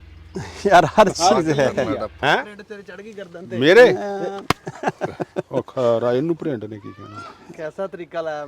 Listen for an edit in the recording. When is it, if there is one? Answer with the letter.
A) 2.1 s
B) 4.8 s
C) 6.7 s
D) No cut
A